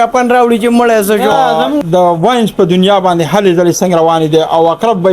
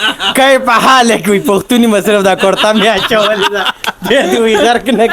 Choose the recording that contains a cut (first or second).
first